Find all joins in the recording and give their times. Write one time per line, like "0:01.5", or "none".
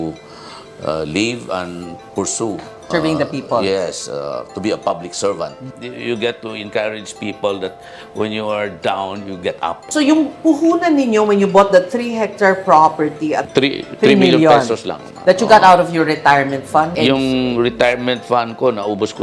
0:02.9
0:05.7
0:09.8

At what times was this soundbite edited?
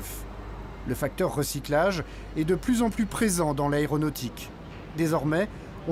none

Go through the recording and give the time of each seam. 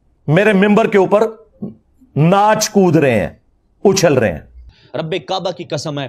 0:04.8

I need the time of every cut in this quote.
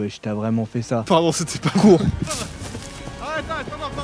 0:02.3

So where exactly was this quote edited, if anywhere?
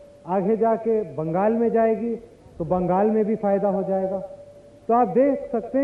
none

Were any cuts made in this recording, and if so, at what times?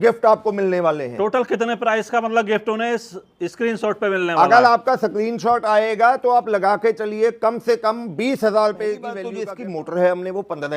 0:09.2

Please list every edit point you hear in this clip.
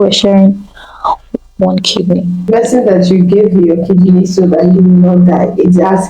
0:02.5

